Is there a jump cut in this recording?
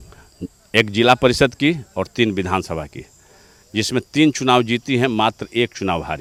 no; 0 cuts

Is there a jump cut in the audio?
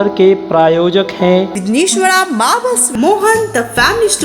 no; 0 cuts

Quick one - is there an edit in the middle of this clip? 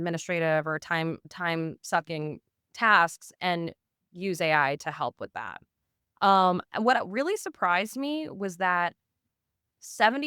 yes; 1 cut; at 9.3 s

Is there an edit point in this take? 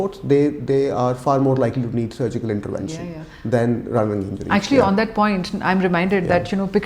no; 0 cuts

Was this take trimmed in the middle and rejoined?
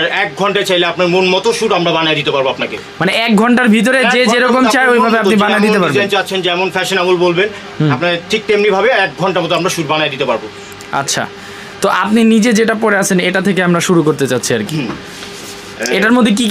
no; 0 cuts

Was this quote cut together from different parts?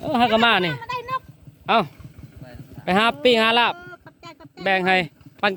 no; 0 cuts

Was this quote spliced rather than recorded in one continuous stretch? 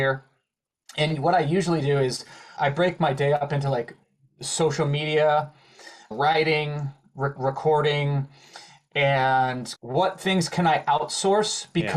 yes; 4 cuts; at 2.5 s, 6.1 s, 7.4 s, 9.7 s

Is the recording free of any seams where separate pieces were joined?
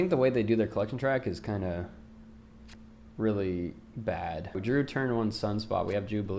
no; 1 cut; at 4.5 s

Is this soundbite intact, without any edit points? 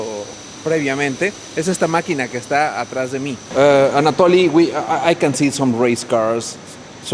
no; 1 cut; at 3.6 s

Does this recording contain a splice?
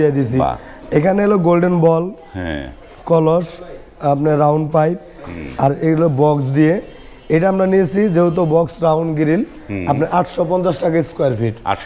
no; 0 cuts

